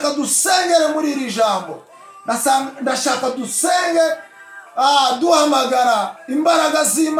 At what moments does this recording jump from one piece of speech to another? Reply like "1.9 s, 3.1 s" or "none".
none